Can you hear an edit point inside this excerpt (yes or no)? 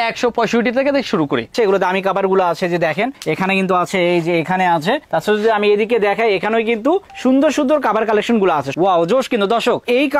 yes